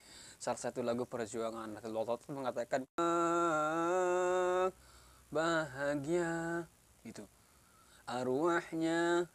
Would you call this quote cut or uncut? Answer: cut